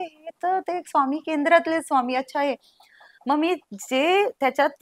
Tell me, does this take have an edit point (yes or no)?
no